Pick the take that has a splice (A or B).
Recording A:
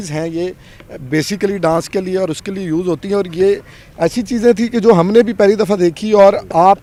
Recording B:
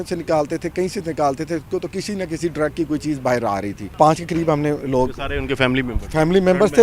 B